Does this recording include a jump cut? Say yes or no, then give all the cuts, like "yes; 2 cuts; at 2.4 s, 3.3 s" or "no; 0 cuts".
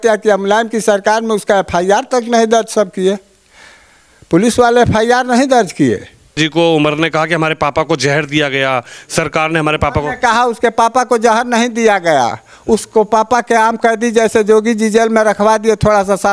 yes; 1 cut; at 6.4 s